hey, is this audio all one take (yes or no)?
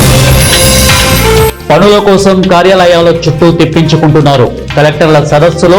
yes